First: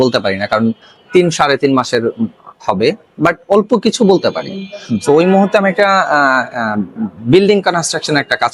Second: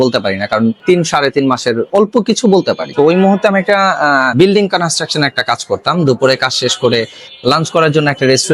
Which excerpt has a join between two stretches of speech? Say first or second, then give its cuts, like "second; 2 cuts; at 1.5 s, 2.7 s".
second; 4 cuts; at 0.8 s, 1.9 s, 2.9 s, 4.3 s